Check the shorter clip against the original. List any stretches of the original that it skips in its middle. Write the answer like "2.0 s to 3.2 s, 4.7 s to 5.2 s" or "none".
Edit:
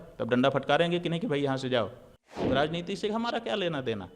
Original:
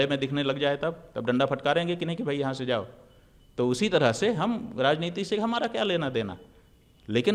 3.3 s to 4.7 s